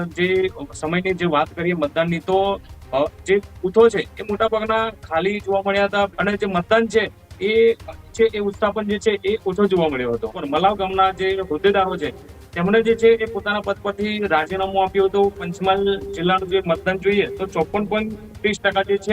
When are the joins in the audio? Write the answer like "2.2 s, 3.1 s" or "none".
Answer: 6.2 s, 10.4 s, 15.5 s